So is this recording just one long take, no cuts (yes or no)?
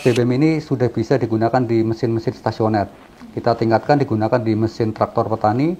yes